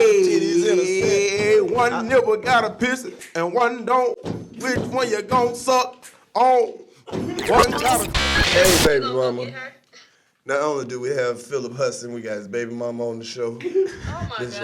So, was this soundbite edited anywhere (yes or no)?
yes